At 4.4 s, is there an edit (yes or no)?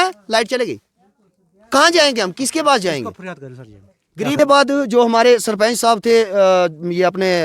yes